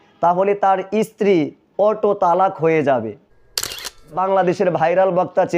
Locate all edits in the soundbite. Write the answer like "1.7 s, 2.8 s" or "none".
3.6 s